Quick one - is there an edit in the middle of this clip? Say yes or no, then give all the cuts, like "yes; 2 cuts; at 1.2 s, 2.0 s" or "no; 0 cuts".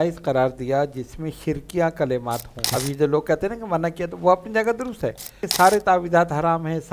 yes; 2 cuts; at 2.7 s, 5.4 s